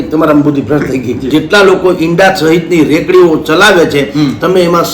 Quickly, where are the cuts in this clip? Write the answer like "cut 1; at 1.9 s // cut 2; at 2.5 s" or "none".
cut 1; at 1.3 s